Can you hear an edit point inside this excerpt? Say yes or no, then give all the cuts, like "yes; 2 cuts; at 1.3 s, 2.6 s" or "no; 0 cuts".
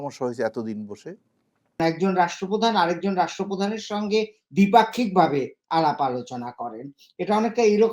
yes; 1 cut; at 1.8 s